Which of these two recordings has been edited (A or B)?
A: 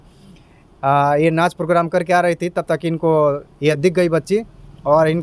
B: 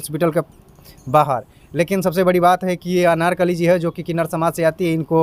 A